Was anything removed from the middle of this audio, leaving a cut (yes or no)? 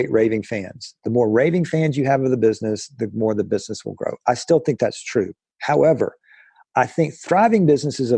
no